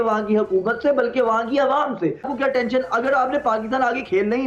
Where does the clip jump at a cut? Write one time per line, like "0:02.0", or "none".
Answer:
0:02.3